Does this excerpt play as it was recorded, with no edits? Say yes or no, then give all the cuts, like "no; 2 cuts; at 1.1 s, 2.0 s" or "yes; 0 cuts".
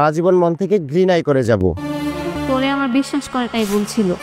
no; 1 cut; at 2.4 s